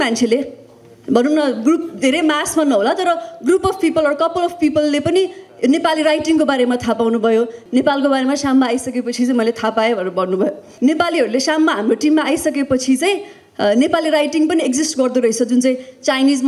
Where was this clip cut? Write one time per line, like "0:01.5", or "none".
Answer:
0:07.6
0:10.7